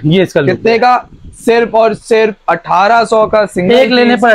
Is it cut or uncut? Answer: uncut